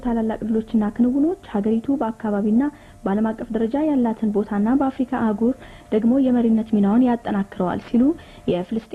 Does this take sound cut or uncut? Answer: uncut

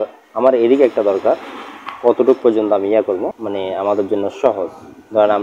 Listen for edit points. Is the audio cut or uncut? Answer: cut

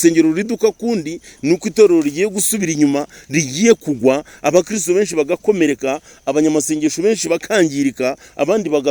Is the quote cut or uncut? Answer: uncut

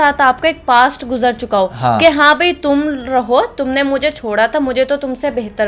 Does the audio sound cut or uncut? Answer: uncut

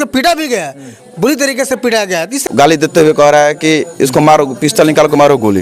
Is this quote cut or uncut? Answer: cut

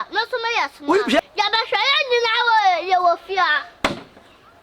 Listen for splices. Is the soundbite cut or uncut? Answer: cut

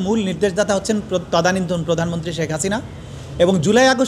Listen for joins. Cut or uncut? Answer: uncut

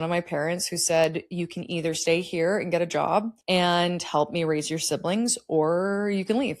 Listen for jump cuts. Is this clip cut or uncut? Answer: cut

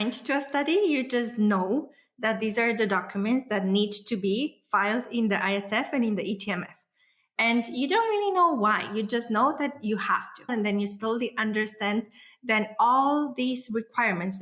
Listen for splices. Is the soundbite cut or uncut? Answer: cut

